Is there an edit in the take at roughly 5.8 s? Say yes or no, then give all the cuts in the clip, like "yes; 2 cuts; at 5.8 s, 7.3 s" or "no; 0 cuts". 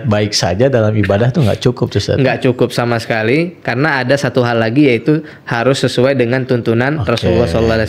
no; 0 cuts